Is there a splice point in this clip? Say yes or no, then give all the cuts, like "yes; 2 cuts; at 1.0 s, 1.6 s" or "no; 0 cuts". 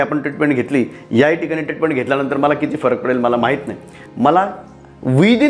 yes; 1 cut; at 4.0 s